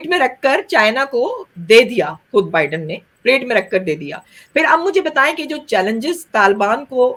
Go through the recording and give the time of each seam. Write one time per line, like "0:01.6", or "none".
none